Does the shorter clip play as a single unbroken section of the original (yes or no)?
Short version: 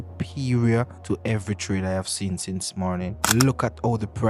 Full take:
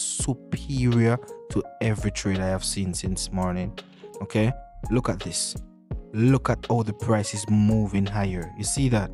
no